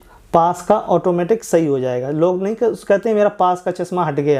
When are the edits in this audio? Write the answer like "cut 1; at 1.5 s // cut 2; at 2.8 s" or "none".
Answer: none